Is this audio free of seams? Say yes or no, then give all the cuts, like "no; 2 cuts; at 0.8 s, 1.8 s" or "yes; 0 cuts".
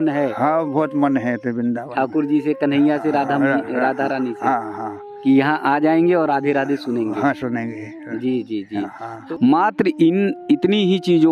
no; 1 cut; at 9.2 s